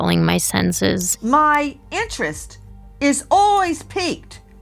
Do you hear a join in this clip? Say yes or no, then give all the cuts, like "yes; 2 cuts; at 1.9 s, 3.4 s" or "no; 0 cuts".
yes; 1 cut; at 1.1 s